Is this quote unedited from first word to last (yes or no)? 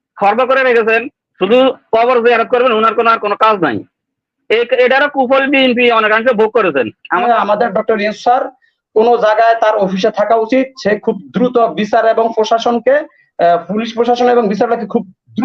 no